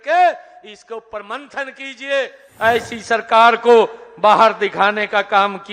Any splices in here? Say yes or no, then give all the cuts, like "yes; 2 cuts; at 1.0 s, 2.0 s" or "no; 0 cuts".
yes; 1 cut; at 2.4 s